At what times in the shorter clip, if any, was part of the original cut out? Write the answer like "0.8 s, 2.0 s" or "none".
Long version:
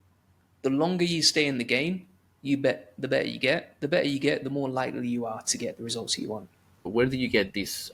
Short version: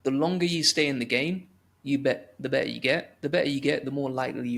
none